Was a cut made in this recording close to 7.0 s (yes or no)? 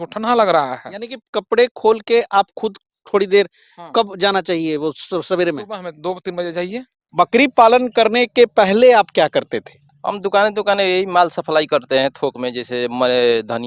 yes